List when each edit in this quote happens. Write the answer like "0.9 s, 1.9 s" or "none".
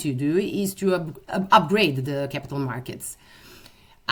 none